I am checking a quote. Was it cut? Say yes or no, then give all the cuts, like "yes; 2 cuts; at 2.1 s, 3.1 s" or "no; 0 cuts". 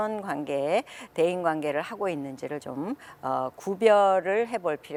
no; 0 cuts